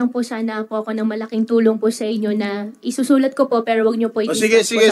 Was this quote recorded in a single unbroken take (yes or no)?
yes